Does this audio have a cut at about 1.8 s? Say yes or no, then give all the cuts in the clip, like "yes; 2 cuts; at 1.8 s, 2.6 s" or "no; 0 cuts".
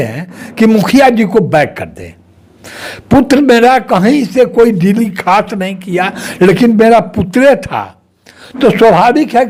no; 0 cuts